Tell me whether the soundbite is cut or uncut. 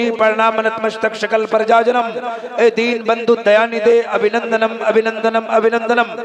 uncut